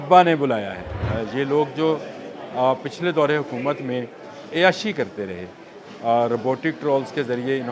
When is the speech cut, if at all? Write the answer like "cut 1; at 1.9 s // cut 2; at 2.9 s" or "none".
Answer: cut 1; at 1.0 s